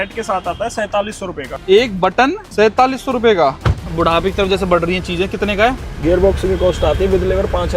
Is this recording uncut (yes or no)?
no